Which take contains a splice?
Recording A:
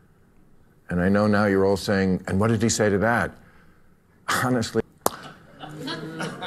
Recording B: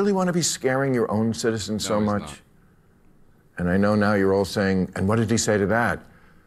A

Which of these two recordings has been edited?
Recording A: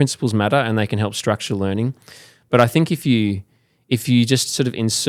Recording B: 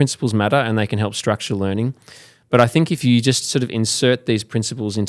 B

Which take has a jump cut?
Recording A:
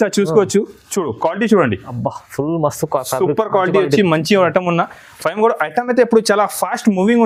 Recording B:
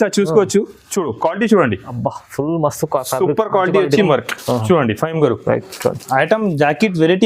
B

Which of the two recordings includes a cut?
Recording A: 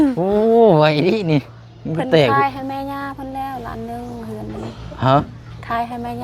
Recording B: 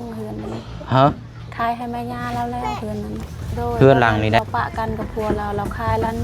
B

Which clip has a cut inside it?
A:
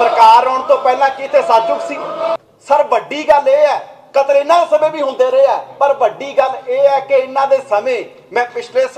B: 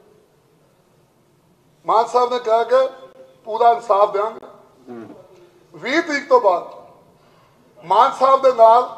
A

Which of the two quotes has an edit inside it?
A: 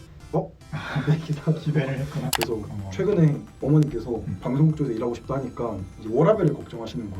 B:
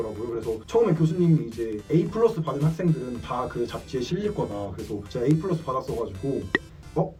A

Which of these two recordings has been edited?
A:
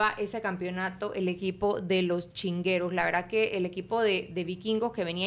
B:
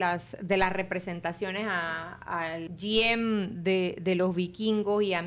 B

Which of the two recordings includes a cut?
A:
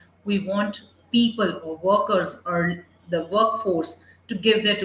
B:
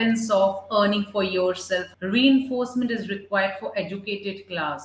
B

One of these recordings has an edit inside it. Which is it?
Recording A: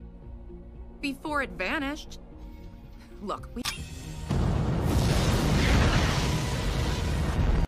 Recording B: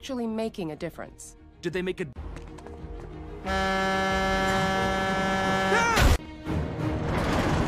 B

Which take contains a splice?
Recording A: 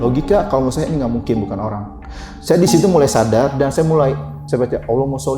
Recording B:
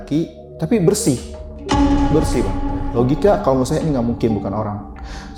A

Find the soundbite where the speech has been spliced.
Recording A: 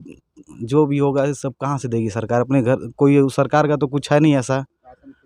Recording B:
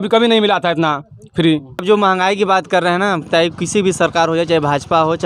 B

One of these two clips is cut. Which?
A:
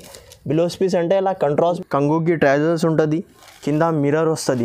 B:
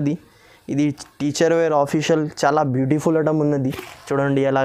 A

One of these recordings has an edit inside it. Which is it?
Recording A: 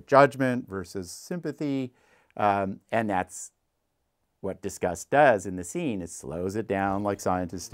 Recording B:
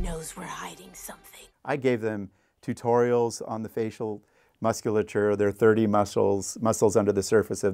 B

